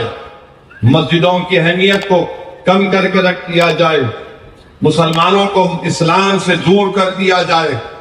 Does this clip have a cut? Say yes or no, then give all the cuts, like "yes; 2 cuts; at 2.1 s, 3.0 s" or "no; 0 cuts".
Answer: no; 0 cuts